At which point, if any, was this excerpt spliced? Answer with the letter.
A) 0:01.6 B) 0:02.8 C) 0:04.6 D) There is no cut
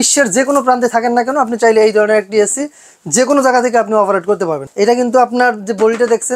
C